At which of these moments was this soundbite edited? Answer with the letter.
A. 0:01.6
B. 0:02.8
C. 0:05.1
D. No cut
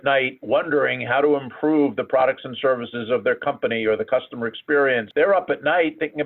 C